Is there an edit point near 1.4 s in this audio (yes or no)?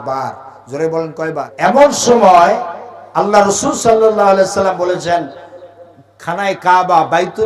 yes